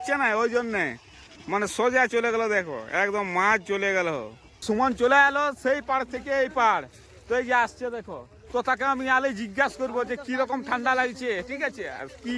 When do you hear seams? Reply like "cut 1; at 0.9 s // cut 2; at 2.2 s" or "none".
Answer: cut 1; at 4.6 s